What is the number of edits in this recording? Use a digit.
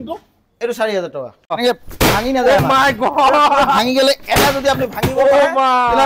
1